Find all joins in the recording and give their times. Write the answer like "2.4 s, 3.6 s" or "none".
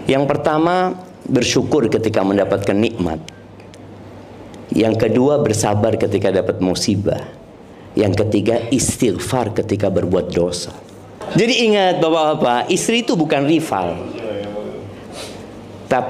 11.2 s